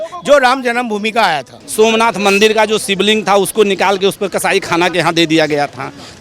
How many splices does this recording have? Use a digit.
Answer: 1